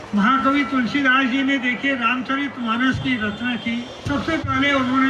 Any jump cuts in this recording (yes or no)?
yes